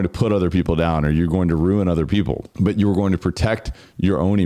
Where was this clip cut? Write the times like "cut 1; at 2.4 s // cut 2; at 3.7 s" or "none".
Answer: none